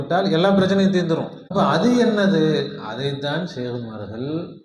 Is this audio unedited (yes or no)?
no